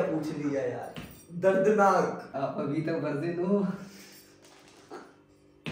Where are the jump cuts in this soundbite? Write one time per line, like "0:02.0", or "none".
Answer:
0:02.4